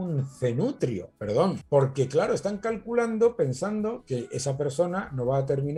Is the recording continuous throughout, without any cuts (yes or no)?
yes